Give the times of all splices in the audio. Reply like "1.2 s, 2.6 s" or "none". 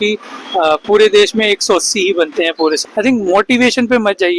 2.8 s